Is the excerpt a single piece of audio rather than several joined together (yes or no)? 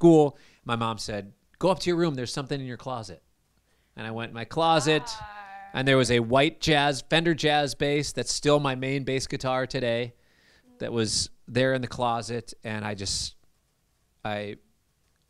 yes